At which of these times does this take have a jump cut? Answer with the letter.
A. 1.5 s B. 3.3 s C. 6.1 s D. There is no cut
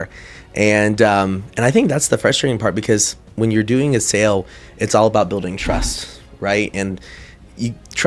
D